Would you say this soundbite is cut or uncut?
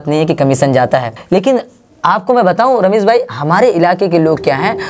cut